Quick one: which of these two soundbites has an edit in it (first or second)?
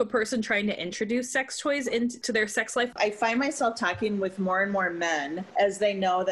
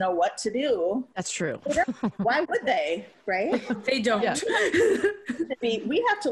first